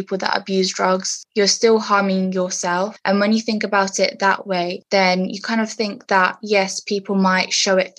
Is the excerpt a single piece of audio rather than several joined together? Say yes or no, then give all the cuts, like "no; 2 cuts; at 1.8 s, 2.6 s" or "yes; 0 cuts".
no; 3 cuts; at 1.2 s, 3.0 s, 4.8 s